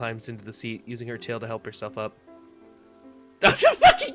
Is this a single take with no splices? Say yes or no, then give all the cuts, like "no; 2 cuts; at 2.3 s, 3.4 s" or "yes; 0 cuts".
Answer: yes; 0 cuts